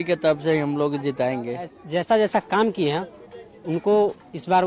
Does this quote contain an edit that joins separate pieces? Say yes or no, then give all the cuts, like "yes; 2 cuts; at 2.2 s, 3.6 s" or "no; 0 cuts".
yes; 1 cut; at 1.8 s